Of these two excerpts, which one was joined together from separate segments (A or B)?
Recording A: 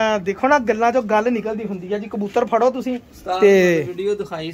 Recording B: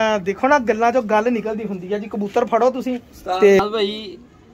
B